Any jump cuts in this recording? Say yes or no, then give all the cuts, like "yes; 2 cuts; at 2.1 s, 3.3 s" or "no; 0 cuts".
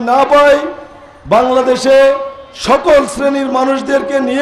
no; 0 cuts